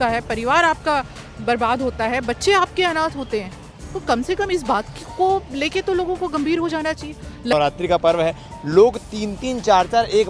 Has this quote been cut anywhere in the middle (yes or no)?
yes